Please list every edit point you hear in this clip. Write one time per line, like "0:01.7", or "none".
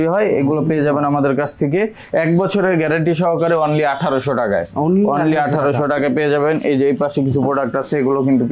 none